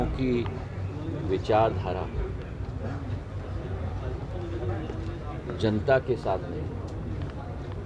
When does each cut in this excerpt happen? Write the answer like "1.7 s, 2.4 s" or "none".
none

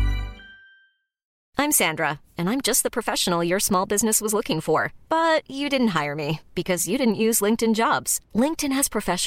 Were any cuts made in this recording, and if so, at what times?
1.3 s

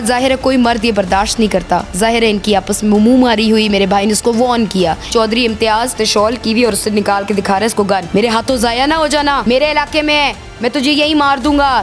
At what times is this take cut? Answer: 5.1 s, 5.9 s, 8.1 s, 9.4 s

